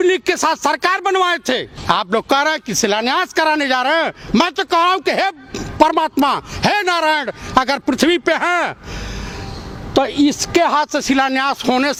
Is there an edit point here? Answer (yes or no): no